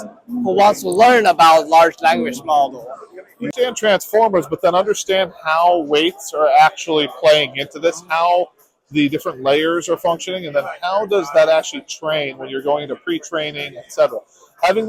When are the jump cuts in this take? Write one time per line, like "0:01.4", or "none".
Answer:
0:03.5